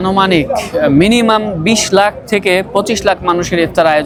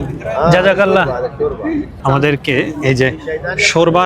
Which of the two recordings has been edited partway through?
second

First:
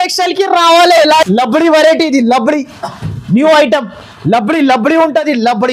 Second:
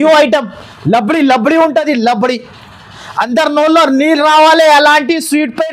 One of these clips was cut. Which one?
first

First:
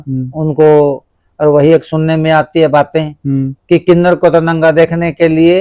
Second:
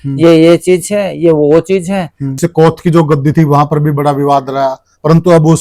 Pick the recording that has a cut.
second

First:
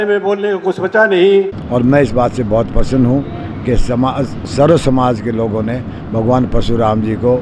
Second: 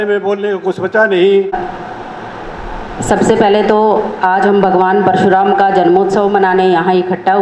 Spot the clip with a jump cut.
first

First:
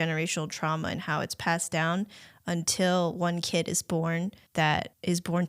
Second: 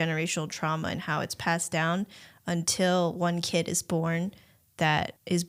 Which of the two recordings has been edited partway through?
first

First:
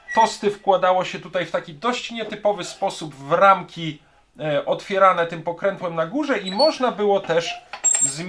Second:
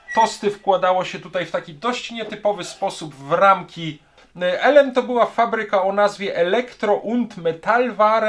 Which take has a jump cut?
second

